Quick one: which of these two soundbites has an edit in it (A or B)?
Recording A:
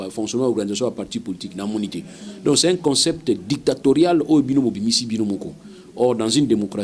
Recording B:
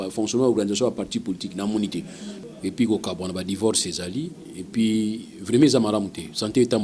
B